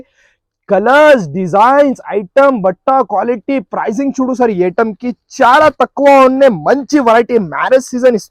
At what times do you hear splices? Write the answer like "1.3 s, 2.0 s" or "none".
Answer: none